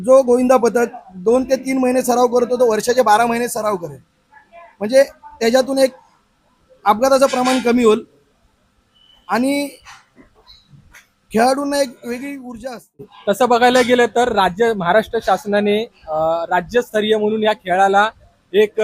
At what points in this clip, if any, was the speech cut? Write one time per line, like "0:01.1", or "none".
none